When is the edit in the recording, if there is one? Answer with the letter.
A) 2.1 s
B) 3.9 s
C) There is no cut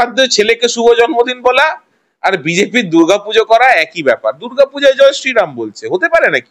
C